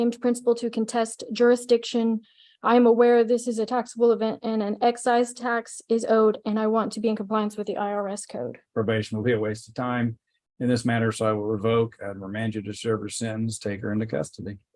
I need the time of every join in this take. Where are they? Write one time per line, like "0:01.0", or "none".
0:08.6